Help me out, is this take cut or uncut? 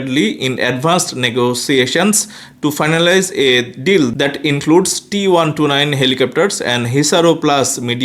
uncut